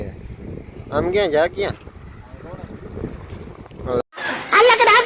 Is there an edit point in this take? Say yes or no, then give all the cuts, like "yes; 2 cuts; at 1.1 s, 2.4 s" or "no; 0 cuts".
yes; 1 cut; at 4.0 s